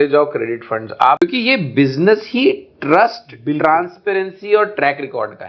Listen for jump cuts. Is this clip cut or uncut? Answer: cut